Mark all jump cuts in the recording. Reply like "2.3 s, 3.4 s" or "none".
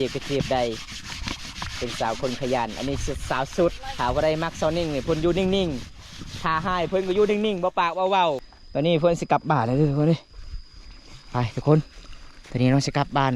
3.9 s, 8.5 s